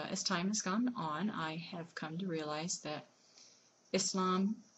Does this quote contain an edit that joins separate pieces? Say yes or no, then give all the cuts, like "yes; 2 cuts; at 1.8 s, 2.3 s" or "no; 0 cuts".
no; 0 cuts